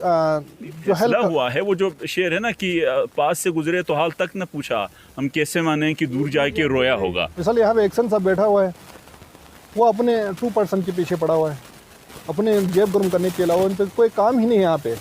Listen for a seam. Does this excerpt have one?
yes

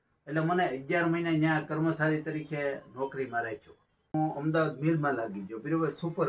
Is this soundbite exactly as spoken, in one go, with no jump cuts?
no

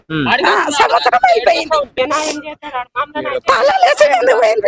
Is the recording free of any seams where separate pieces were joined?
no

